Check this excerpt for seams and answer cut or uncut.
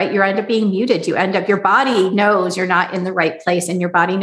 uncut